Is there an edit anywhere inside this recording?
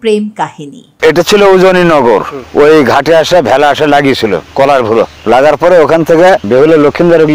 yes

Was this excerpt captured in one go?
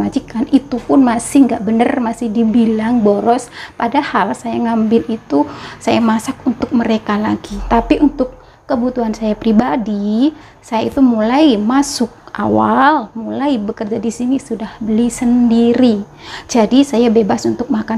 no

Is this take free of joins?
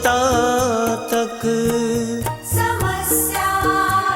no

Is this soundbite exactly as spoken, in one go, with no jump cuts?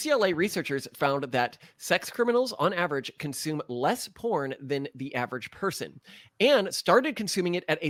yes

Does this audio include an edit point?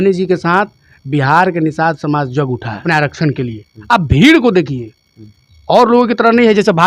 yes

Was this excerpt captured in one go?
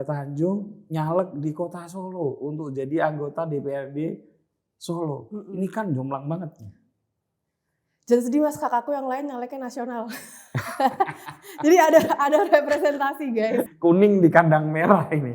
no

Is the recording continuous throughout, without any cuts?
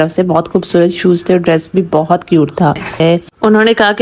no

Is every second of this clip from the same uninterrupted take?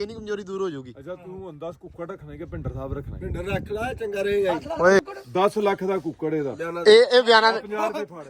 no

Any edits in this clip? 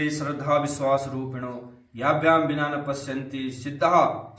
no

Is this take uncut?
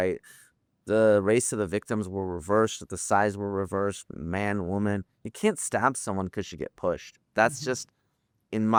yes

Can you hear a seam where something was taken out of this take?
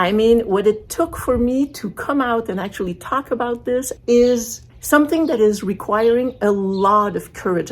yes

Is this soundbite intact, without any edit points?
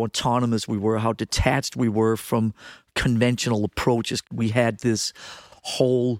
no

